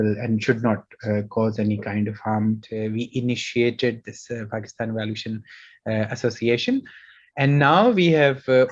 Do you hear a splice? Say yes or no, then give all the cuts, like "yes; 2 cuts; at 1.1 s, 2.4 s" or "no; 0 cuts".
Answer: yes; 1 cut; at 2.7 s